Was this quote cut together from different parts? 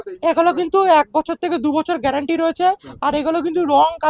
no; 0 cuts

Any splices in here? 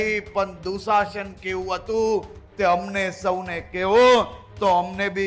no; 0 cuts

